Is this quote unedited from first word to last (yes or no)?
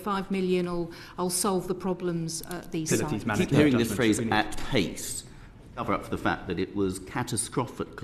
no